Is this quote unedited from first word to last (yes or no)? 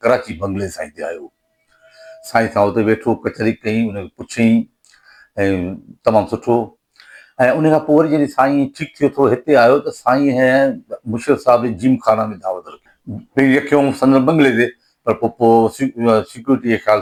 yes